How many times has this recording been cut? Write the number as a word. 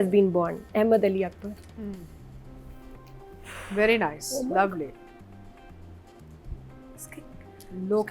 zero